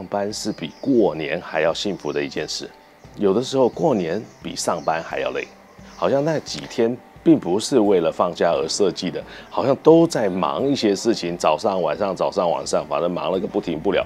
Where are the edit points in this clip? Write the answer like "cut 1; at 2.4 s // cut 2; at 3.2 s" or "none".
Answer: cut 1; at 5.8 s